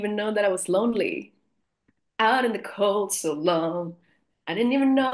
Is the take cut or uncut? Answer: uncut